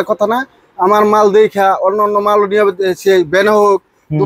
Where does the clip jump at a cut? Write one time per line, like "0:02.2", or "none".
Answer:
none